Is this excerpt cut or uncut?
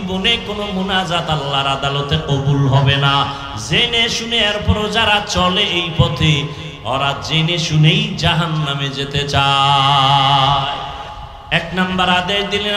cut